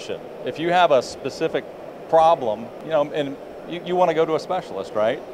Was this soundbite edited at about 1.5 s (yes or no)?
no